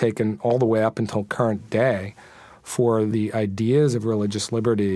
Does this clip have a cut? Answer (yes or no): no